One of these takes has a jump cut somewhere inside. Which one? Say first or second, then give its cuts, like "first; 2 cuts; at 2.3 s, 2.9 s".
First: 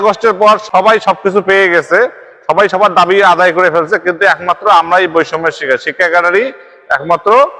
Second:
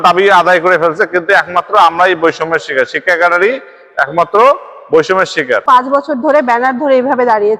second; 1 cut; at 5.6 s